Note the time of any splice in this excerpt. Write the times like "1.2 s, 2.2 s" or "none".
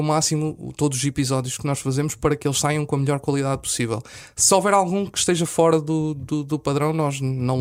none